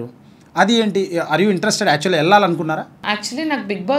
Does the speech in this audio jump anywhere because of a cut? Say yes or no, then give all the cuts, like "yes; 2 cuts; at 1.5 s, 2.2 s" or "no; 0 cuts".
yes; 1 cut; at 3.0 s